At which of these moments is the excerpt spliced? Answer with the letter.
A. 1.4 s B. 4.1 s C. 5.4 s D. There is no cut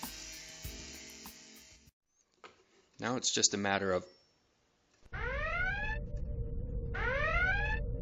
B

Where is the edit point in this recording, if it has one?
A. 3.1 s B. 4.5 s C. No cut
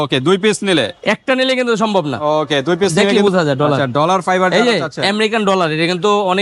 A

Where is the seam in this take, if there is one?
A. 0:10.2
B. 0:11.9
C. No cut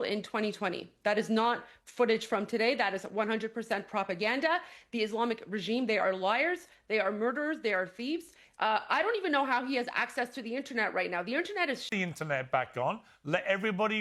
B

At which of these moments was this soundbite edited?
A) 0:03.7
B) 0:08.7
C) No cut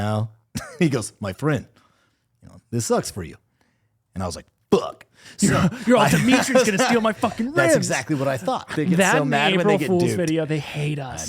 B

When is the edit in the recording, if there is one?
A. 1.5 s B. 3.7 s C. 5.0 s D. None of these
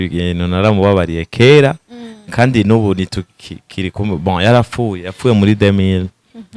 D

